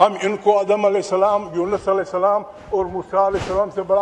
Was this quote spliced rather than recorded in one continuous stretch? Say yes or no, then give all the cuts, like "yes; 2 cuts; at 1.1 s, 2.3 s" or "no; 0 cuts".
no; 0 cuts